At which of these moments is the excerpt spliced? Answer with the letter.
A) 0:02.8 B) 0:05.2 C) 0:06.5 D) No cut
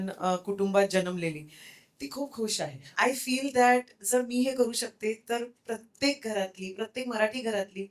A